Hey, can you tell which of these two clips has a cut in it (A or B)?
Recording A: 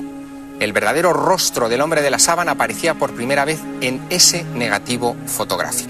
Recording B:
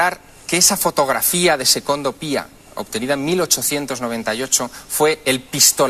A